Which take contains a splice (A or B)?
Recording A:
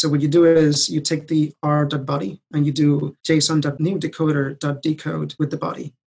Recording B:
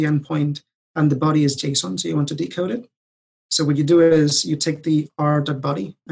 A